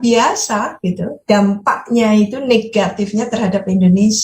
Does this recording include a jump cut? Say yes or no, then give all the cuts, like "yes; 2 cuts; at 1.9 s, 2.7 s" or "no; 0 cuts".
no; 0 cuts